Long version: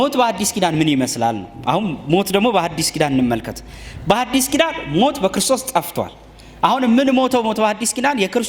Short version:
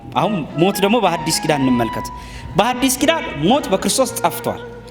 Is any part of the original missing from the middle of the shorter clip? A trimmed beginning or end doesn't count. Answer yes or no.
no